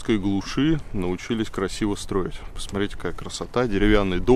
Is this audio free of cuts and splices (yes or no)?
yes